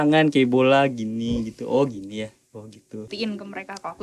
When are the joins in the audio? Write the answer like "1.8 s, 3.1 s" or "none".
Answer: 3.1 s